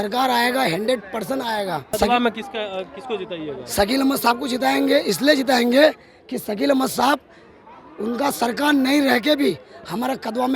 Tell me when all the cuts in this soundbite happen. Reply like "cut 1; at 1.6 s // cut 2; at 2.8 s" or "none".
cut 1; at 2.0 s

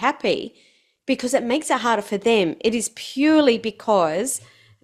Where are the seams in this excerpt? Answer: none

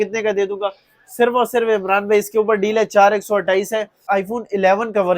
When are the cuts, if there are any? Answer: cut 1; at 4.0 s

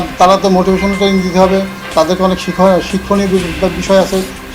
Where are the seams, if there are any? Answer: none

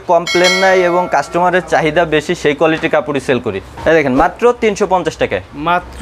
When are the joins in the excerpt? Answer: cut 1; at 3.7 s

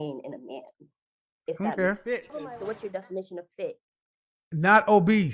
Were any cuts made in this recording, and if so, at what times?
cut 1; at 2.4 s

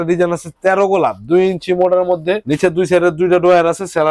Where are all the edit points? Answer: none

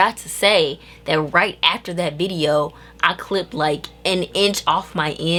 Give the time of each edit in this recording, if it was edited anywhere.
none

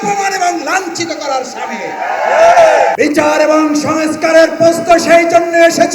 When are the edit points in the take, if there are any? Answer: cut 1; at 2.9 s

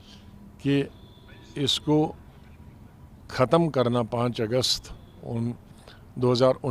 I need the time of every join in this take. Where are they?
none

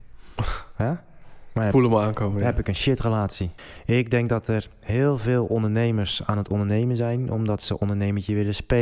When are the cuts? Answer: cut 1; at 3.5 s

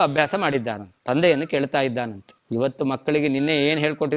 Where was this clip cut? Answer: cut 1; at 0.9 s

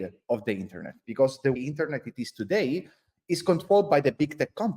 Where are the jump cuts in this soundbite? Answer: cut 1; at 1.6 s

